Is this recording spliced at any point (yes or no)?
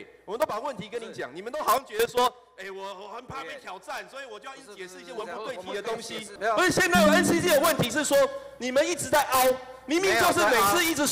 yes